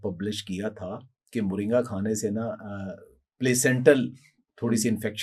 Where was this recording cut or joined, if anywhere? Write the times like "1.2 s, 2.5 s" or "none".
none